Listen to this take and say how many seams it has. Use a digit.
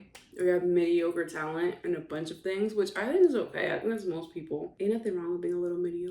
1